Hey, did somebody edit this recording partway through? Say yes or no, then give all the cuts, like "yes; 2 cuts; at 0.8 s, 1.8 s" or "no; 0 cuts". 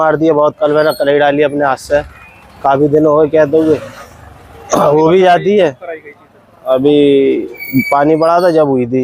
no; 0 cuts